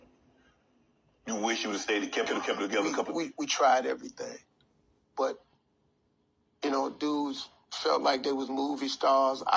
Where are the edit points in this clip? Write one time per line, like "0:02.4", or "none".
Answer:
0:02.3